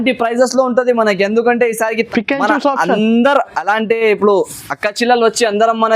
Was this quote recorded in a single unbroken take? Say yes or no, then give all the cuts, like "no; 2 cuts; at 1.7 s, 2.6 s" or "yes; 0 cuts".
no; 1 cut; at 2.1 s